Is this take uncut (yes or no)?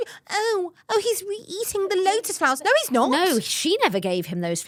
yes